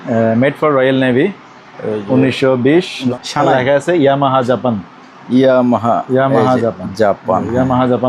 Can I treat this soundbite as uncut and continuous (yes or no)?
no